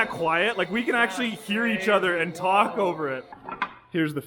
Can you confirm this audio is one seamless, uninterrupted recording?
no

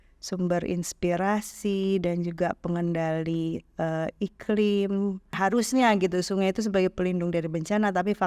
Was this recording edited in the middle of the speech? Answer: yes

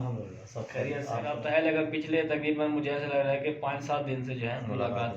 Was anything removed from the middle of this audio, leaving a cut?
yes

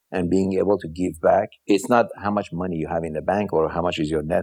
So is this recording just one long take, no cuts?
no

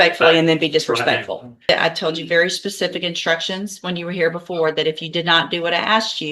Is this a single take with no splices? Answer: no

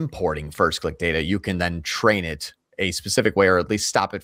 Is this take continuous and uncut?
yes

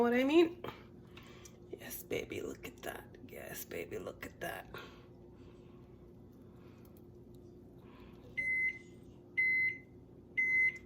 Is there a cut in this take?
no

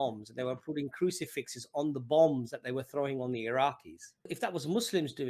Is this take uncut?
no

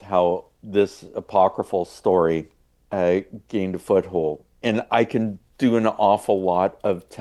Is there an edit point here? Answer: no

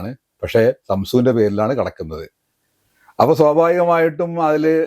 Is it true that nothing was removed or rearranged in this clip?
yes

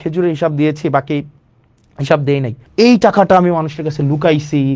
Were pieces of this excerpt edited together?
yes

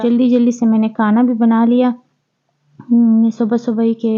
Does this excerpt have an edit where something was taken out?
no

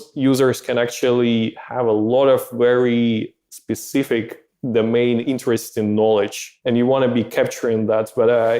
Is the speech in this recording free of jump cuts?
no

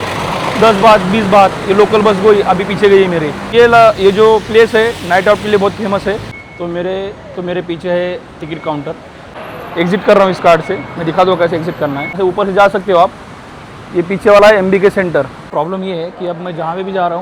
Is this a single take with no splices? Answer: no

